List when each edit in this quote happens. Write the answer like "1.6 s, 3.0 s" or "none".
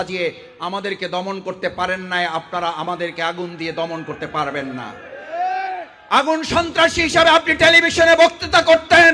none